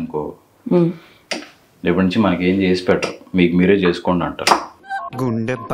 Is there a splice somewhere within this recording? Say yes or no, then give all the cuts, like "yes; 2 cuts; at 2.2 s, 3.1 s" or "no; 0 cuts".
no; 0 cuts